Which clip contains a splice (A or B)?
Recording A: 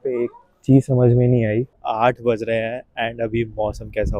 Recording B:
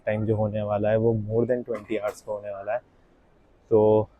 A